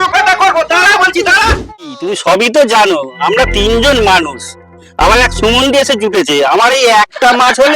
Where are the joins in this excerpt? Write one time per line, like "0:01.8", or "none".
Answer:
0:01.7